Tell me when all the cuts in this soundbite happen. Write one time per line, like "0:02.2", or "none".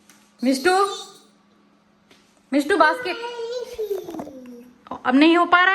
0:01.0

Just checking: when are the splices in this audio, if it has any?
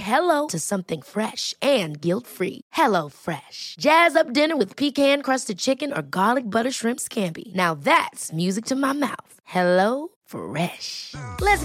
none

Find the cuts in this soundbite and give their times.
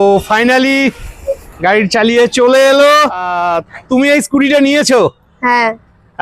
0:03.3

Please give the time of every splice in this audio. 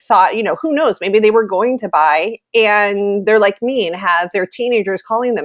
none

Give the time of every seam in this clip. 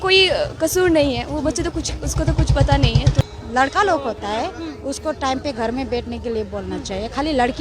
0:03.2

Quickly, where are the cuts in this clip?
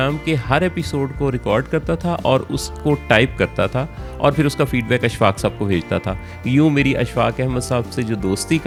none

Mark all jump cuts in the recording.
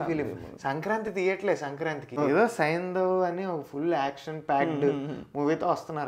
0:02.2

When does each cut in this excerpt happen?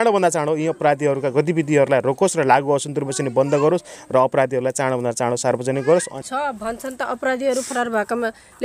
0:06.1

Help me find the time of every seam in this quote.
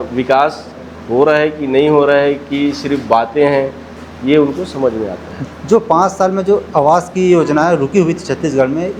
0:05.3

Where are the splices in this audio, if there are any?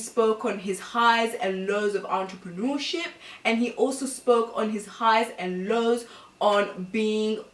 none

